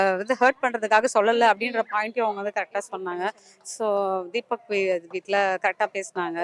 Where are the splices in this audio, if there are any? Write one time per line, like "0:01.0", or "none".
none